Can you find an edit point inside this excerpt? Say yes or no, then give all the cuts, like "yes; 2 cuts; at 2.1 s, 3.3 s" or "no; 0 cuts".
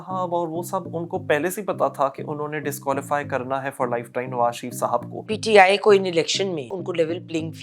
yes; 2 cuts; at 5.3 s, 6.7 s